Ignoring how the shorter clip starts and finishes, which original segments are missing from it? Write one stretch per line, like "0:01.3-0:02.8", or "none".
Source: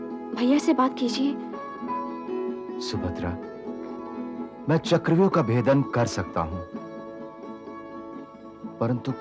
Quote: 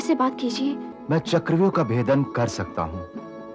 0:01.5-0:04.5